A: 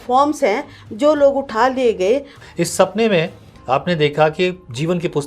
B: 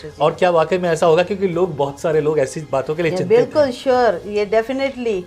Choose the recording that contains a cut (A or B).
A